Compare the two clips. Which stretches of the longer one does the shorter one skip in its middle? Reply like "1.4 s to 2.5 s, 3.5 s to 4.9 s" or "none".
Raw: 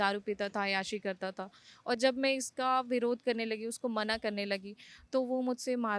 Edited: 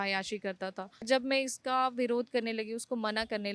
1.7 s to 2.0 s